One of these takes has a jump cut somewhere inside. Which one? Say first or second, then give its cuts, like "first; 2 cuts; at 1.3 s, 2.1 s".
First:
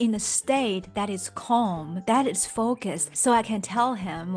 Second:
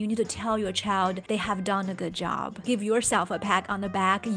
second; 2 cuts; at 1.2 s, 2.6 s